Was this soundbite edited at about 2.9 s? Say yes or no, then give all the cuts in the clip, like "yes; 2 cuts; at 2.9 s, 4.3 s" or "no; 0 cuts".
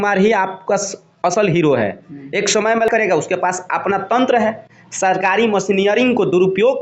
yes; 1 cut; at 2.9 s